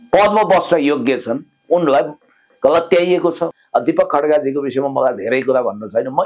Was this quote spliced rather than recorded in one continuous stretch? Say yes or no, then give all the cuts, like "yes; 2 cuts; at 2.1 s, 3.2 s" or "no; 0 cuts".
yes; 1 cut; at 3.5 s